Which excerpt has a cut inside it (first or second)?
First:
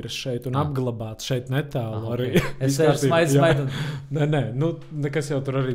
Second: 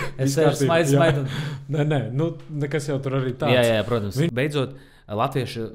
second